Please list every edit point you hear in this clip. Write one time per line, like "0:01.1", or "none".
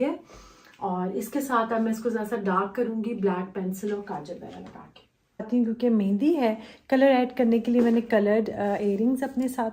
0:05.5